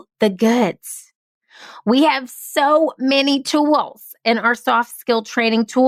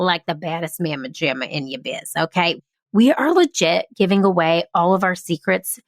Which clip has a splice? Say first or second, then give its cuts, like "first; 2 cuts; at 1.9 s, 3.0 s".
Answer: second; 1 cut; at 2.5 s